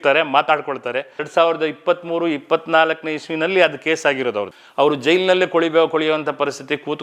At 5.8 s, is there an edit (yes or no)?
no